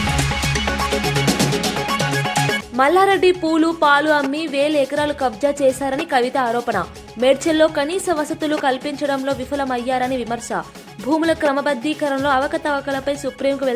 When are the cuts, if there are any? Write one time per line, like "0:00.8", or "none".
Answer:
0:02.6